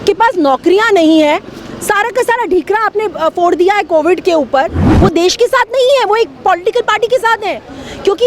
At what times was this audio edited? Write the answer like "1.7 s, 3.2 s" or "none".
4.9 s